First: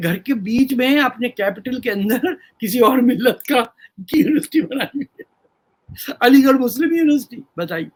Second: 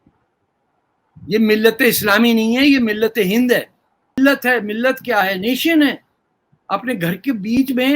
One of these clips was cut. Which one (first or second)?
second